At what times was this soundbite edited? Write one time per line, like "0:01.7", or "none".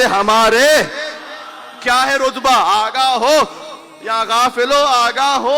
none